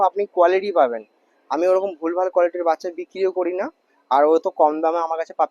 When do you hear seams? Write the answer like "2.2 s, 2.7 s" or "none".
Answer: none